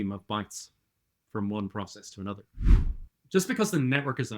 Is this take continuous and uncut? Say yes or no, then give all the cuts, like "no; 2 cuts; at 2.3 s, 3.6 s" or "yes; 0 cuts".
no; 1 cut; at 2.9 s